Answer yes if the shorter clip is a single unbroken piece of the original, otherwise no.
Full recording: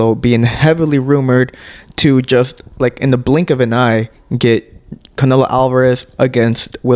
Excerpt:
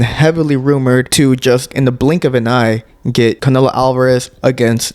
no